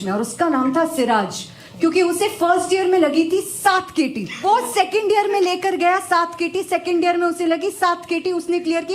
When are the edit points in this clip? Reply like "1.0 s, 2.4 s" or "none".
4.4 s